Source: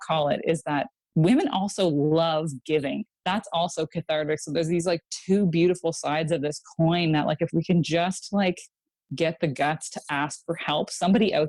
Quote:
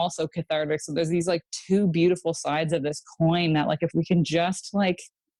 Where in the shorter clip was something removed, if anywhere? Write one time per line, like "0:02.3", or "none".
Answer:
none